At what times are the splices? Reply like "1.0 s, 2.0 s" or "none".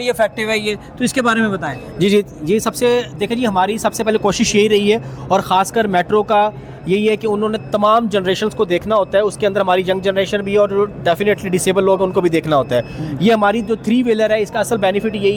none